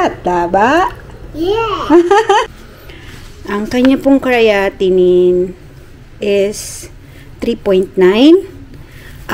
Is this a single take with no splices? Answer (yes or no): no